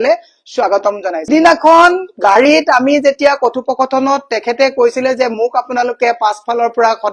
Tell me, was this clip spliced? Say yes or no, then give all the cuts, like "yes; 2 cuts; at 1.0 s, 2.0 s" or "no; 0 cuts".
yes; 1 cut; at 1.3 s